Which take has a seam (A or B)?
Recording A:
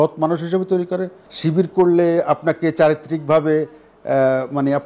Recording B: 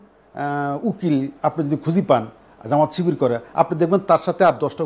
A